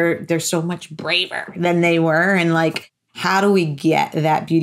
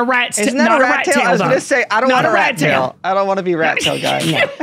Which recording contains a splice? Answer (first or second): first